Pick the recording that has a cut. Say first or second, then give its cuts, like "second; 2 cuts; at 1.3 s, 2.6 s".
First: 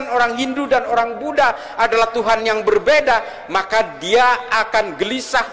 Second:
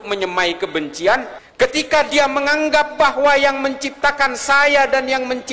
second; 1 cut; at 1.4 s